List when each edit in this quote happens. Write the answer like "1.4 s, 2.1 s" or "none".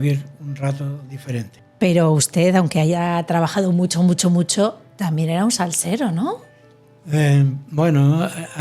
none